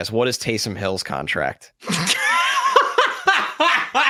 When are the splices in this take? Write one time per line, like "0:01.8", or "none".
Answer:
none